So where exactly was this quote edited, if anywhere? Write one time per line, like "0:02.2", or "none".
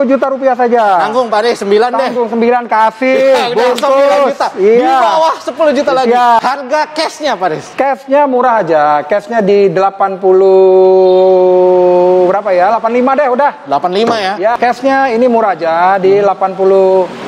0:06.4
0:14.5